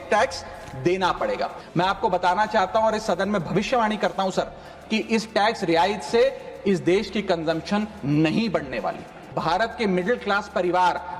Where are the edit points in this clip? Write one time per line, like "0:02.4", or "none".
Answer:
0:01.6
0:09.4